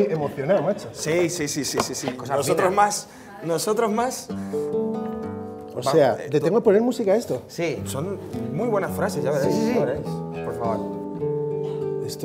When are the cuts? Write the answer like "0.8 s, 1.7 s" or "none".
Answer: none

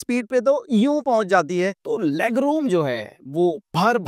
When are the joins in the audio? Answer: 1.8 s

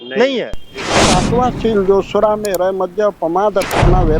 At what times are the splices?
1.0 s

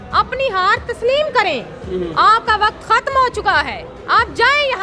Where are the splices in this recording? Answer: none

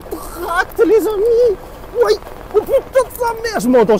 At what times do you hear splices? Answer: none

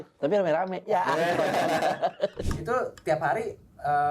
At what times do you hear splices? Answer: 2.4 s

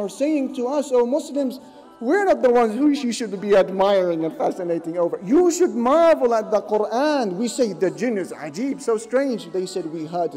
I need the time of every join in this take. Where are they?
none

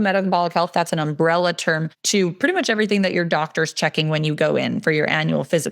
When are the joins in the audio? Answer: 1.9 s

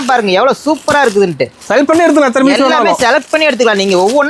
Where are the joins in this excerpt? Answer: none

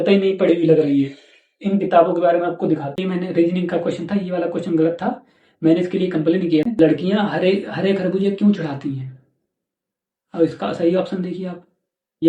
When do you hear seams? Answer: 3.0 s, 6.7 s

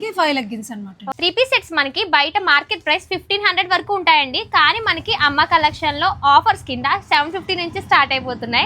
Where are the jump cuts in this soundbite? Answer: 1.0 s

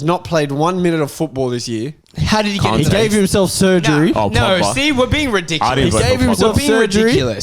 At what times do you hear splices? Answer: 2.0 s

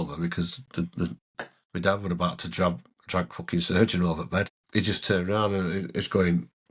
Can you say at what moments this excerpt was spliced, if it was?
4.6 s

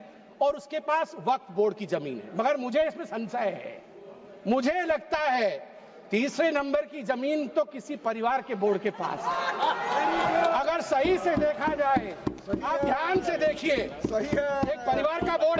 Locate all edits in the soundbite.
none

